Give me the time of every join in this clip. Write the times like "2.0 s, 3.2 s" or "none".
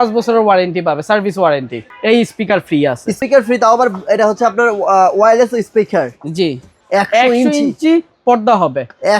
1.7 s, 3.2 s, 6.7 s

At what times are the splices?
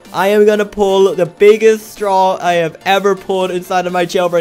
none

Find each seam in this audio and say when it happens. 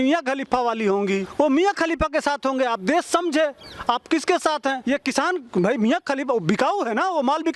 1.3 s, 4.8 s

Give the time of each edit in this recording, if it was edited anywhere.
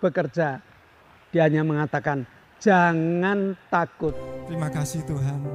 4.2 s

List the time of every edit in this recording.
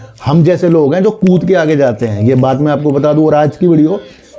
none

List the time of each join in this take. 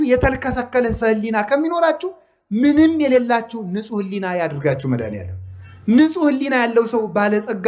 none

